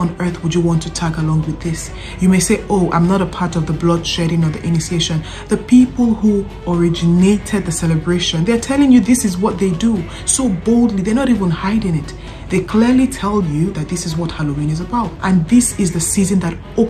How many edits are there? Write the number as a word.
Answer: one